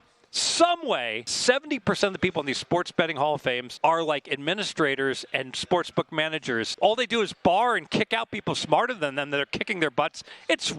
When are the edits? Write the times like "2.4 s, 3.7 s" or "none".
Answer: 1.3 s, 3.7 s, 6.7 s